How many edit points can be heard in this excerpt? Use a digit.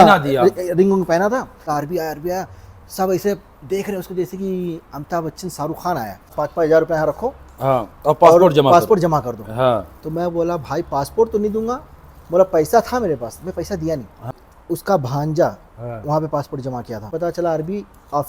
4